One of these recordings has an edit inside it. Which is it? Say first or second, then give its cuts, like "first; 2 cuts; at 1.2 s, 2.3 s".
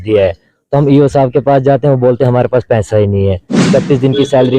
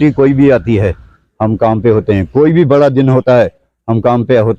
first; 1 cut; at 3.7 s